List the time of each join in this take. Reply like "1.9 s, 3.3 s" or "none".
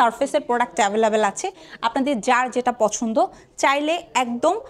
none